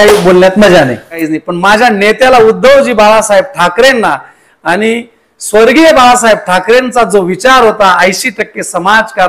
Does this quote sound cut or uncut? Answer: cut